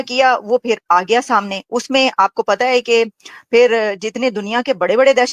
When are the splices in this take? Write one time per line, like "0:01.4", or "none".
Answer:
none